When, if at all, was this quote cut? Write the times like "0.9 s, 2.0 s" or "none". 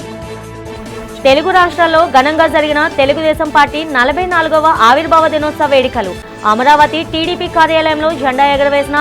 1.2 s